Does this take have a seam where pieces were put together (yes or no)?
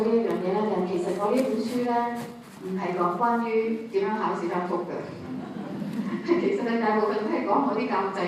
no